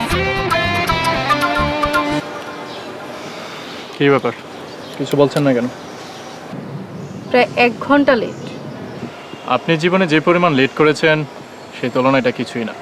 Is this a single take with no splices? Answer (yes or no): no